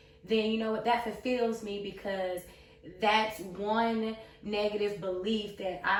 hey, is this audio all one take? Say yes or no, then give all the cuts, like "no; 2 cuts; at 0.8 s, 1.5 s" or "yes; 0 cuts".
yes; 0 cuts